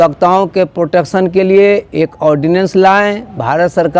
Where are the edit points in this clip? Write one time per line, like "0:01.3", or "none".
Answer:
none